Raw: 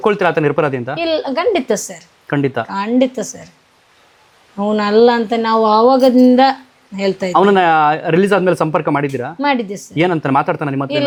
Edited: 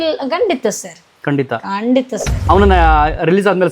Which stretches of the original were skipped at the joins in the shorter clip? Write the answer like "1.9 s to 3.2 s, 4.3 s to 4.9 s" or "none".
3.4 s to 7.2 s